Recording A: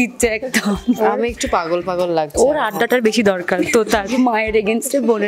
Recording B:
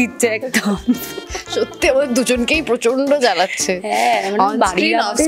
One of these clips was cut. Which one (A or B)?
A